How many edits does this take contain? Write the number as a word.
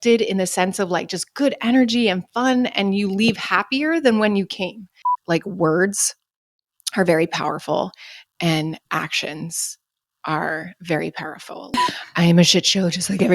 two